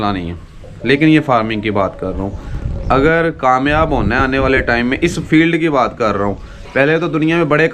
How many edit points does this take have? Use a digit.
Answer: 0